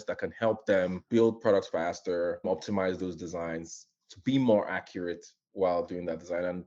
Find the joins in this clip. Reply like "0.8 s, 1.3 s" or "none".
1.0 s, 2.5 s